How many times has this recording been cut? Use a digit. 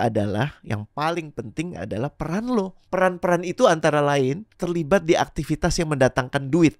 2